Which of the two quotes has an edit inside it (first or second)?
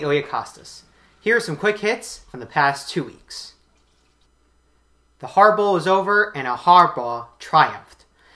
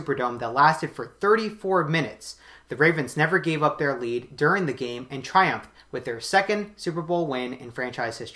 second